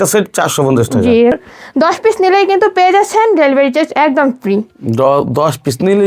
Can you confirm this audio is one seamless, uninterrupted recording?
no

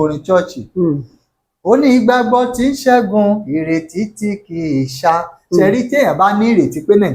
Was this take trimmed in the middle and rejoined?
no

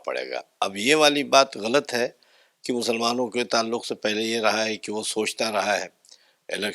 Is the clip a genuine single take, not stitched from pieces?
yes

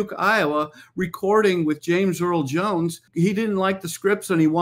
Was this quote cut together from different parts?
yes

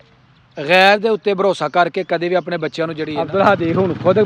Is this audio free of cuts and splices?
no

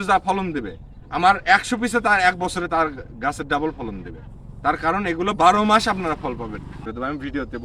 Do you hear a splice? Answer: yes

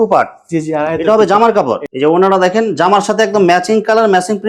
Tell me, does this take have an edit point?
yes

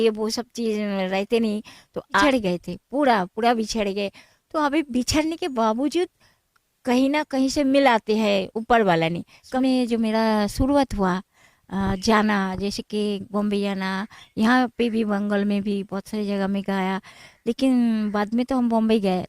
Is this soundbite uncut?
no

